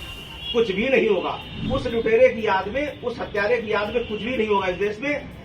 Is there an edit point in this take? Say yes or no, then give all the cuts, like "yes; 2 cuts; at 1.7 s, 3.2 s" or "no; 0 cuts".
yes; 1 cut; at 1.5 s